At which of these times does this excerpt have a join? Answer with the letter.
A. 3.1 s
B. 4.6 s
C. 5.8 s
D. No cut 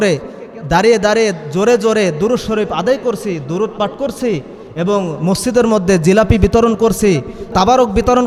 D